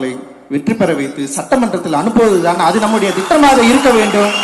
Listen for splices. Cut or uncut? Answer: uncut